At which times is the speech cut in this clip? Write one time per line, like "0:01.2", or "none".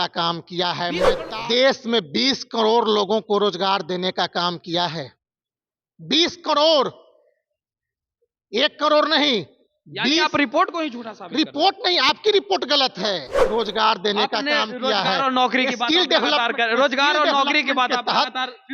0:01.2
0:13.3